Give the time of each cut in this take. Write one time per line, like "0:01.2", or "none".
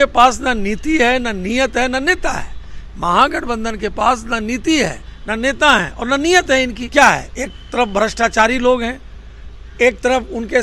0:06.8